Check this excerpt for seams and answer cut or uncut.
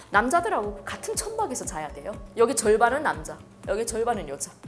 uncut